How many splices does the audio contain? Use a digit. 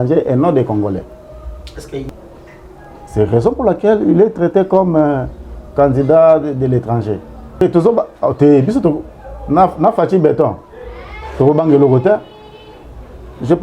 2